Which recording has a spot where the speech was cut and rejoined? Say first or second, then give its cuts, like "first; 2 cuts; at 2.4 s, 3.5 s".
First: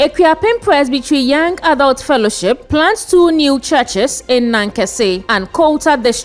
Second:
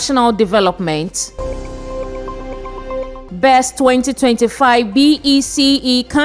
second; 2 cuts; at 1.4 s, 3.2 s